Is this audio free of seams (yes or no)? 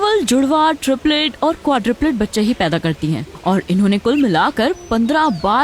yes